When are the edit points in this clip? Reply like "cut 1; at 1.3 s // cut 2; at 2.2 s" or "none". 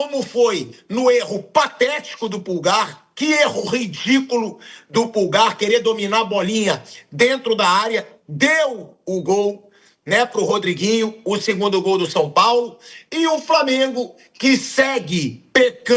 none